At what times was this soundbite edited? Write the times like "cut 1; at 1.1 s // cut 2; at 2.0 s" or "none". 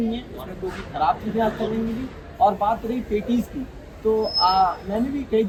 none